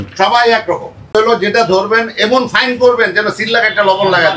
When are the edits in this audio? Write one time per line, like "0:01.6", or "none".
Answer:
0:01.1

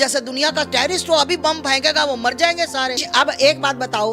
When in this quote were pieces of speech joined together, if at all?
0:03.1

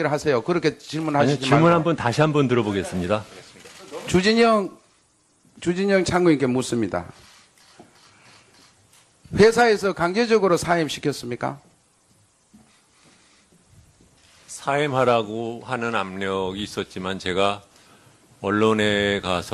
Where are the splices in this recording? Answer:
none

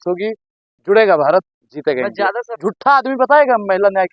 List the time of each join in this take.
0:02.5

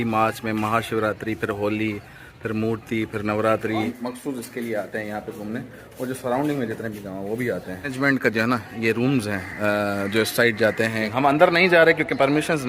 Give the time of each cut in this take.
0:03.9
0:07.9
0:11.1

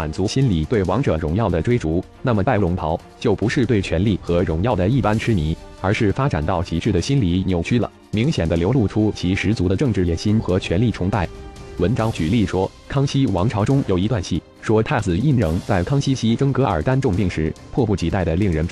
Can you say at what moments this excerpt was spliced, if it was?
0:03.2

